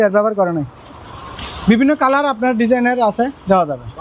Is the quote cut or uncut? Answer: uncut